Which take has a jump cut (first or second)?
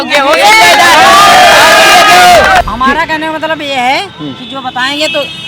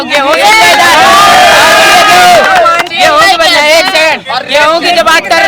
first